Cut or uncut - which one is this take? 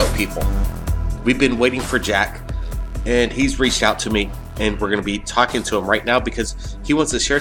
uncut